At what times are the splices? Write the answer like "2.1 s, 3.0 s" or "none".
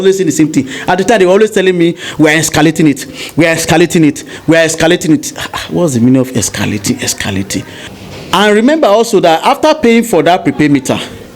7.8 s

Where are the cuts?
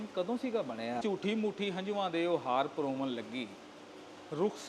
1.0 s

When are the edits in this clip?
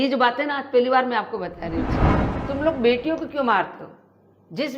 2.3 s

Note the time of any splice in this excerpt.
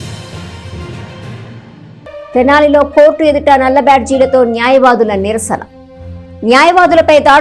1.7 s

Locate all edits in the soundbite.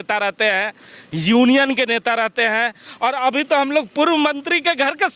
none

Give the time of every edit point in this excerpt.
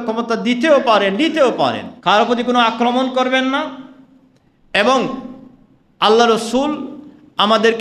1.9 s

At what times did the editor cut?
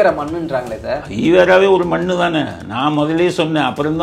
none

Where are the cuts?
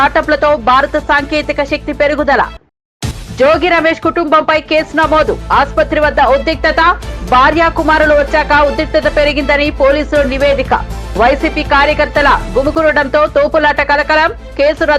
none

